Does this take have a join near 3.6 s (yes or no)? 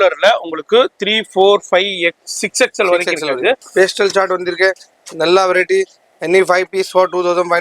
yes